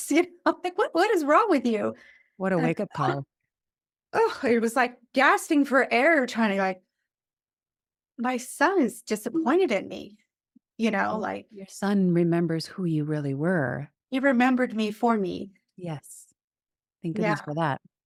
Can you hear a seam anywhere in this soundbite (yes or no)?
no